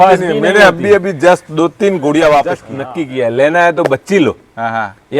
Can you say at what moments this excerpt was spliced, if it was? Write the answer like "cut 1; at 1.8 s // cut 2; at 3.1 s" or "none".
cut 1; at 2.8 s